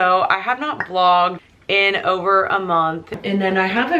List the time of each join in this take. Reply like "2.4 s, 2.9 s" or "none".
1.5 s, 3.1 s